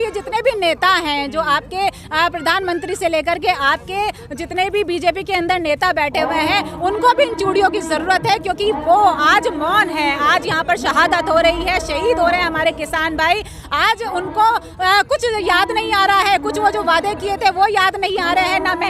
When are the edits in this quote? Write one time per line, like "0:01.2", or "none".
none